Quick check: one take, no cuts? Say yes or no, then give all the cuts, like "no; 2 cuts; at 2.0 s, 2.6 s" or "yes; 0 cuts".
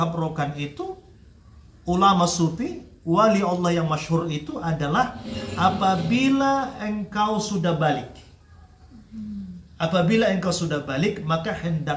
yes; 0 cuts